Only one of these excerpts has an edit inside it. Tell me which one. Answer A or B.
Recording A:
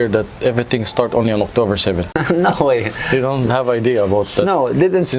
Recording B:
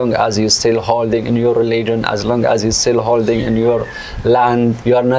A